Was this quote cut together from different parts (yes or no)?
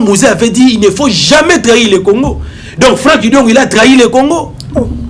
no